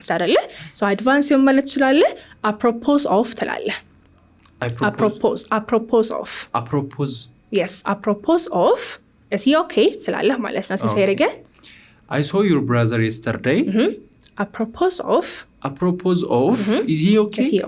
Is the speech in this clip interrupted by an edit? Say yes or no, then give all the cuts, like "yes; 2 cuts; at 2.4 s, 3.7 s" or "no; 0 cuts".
no; 0 cuts